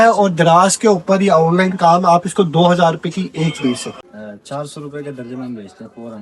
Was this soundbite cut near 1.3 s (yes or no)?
no